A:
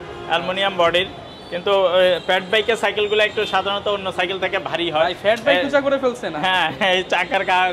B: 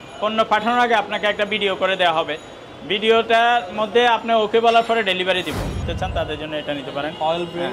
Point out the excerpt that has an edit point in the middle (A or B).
B